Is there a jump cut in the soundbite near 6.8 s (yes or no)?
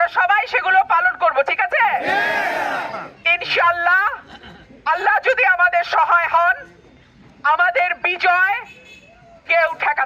no